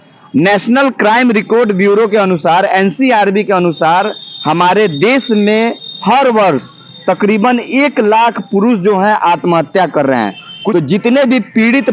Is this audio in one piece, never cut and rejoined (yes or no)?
no